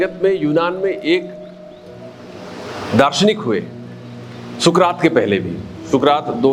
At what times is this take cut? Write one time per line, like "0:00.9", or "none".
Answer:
none